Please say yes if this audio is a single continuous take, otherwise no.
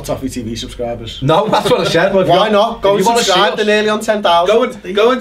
yes